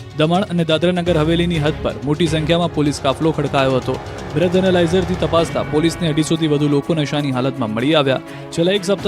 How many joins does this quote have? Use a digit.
0